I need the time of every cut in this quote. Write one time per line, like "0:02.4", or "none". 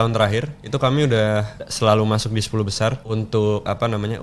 0:01.6
0:03.0